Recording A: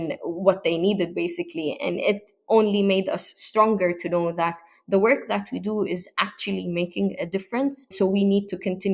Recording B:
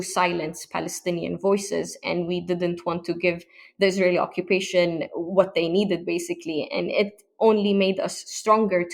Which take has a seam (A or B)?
A